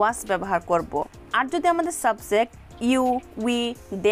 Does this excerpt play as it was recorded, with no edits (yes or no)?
no